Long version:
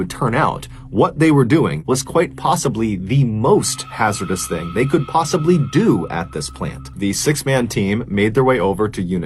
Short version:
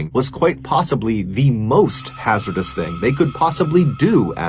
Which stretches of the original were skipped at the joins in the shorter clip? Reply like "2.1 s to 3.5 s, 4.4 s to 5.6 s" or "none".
none

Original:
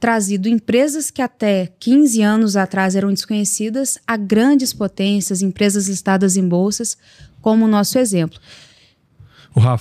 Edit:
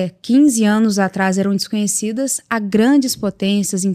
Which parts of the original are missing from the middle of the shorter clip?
none

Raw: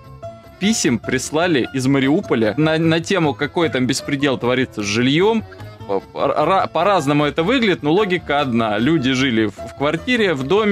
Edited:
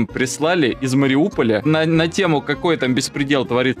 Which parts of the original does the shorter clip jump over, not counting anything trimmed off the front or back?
none

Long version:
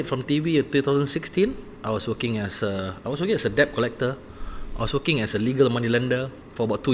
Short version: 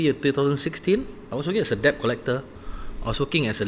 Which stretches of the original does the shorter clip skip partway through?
1.7 s to 2.9 s

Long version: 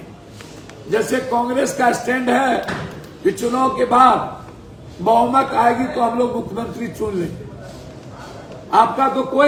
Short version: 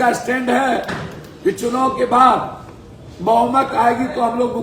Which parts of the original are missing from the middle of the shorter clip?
none

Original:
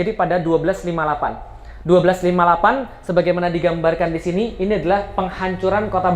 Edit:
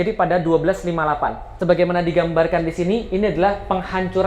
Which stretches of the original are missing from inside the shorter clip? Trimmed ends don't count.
1.5 s to 3.0 s

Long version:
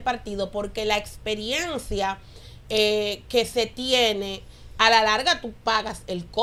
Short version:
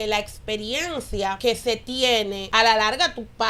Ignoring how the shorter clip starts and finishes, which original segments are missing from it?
2.1 s to 3.3 s, 4.3 s to 4.7 s

